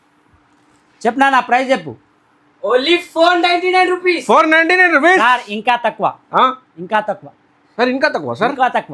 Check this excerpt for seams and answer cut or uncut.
uncut